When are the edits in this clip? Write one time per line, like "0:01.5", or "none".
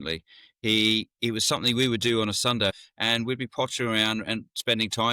0:02.8